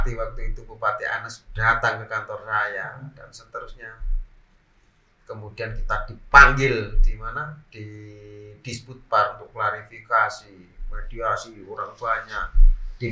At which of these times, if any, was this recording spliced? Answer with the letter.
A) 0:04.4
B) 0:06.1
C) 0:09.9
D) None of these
D